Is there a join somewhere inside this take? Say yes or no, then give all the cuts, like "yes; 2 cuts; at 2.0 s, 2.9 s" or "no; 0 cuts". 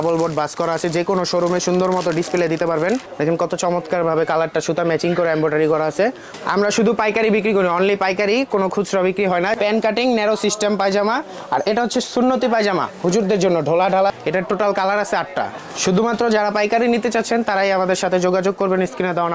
yes; 5 cuts; at 3.1 s, 6.3 s, 9.5 s, 14.1 s, 15.6 s